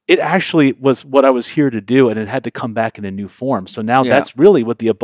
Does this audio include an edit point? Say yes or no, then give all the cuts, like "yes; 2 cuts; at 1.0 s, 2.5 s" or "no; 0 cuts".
no; 0 cuts